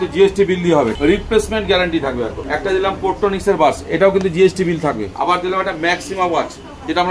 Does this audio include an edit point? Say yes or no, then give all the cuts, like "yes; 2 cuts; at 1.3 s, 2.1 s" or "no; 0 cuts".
yes; 3 cuts; at 0.9 s, 2.4 s, 5.1 s